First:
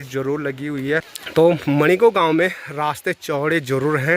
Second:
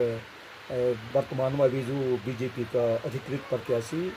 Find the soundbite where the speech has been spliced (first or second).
first